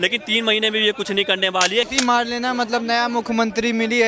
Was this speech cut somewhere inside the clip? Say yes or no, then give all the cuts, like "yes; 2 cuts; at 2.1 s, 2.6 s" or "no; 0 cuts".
yes; 1 cut; at 1.9 s